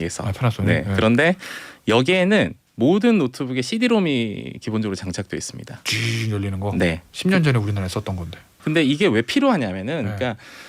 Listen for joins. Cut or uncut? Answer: cut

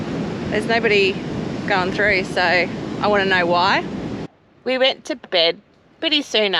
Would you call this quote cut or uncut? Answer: cut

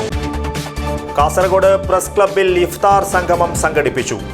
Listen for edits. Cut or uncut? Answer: uncut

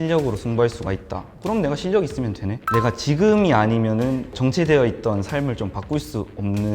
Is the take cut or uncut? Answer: cut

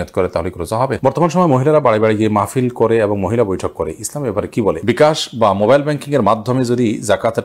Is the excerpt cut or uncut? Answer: cut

